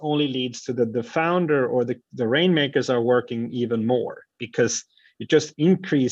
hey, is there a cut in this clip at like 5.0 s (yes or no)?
no